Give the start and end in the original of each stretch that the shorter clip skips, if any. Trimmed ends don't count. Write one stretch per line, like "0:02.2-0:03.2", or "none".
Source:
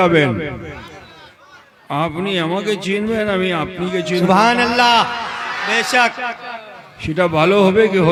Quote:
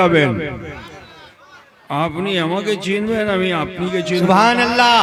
none